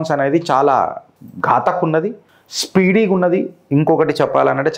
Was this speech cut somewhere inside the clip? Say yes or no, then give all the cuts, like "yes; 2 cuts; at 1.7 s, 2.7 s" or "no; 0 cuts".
no; 0 cuts